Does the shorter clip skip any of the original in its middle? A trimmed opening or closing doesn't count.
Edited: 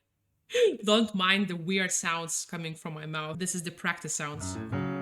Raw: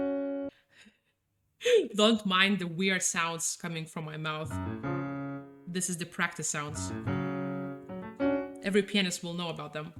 yes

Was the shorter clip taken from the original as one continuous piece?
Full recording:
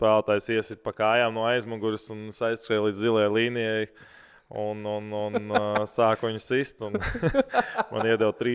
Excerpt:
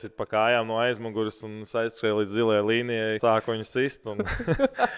no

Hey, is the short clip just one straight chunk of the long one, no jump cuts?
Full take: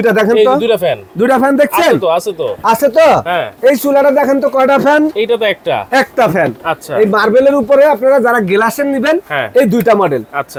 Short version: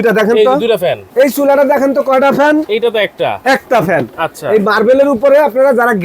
no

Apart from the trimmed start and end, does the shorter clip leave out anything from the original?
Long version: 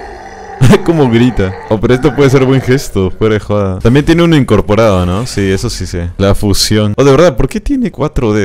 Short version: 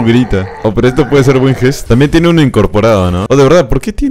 yes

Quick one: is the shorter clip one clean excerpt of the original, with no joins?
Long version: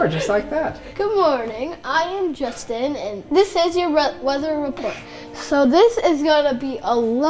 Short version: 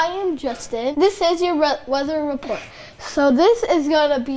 no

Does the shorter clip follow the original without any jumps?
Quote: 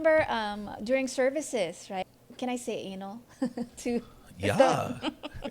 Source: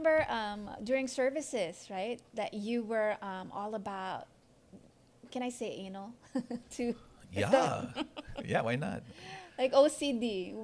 no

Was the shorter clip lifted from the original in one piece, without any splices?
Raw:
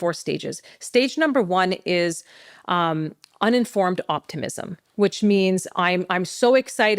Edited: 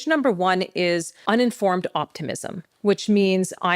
no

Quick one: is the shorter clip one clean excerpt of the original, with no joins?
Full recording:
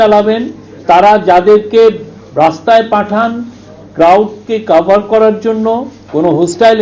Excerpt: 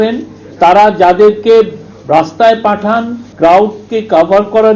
no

